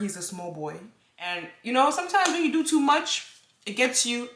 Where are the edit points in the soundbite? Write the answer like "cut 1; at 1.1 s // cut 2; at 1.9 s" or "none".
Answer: cut 1; at 1.5 s